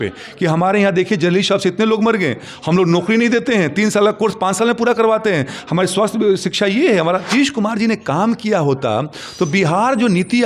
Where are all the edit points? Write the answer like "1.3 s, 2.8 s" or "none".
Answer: 7.3 s